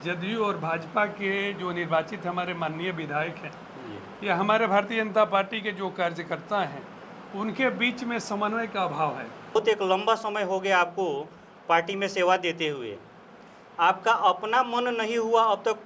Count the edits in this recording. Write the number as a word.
one